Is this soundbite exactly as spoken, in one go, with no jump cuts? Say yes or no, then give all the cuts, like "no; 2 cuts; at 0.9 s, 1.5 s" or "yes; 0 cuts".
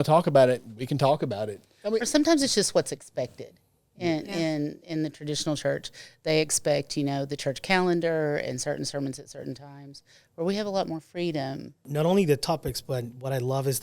no; 1 cut; at 11.8 s